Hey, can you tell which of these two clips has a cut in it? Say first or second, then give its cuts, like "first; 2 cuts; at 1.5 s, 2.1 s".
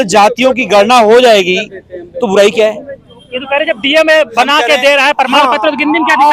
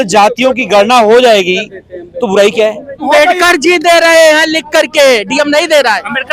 second; 1 cut; at 3.0 s